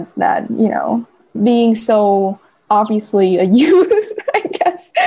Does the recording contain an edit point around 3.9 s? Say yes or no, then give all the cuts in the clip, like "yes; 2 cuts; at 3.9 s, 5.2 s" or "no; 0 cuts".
no; 2 cuts; at 1.3 s, 2.6 s